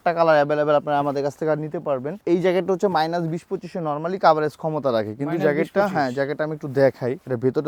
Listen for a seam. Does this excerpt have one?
no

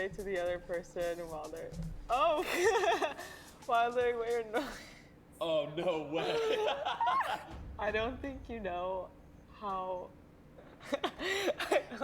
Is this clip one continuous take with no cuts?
no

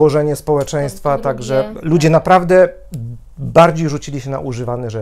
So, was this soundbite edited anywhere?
no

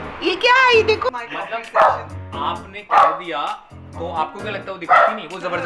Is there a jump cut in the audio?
yes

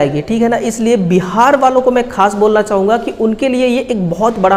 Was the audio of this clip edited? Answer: no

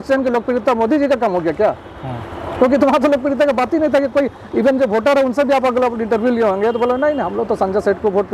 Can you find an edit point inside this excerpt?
no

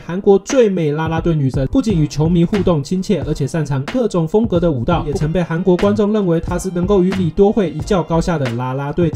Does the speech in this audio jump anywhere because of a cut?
yes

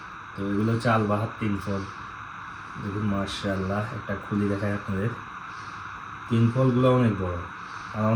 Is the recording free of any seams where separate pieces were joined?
yes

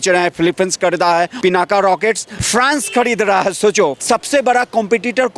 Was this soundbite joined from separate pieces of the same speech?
yes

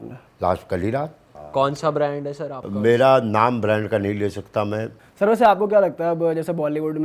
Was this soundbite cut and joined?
yes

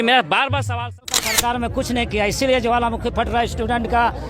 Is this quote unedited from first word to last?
no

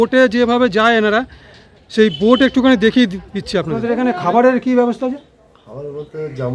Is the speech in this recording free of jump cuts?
no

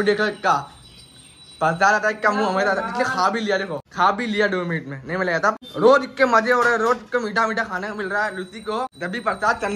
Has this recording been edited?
no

